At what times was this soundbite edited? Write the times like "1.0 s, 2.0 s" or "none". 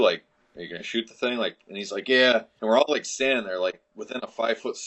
2.5 s